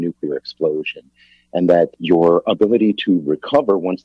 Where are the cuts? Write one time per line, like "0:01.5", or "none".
0:02.0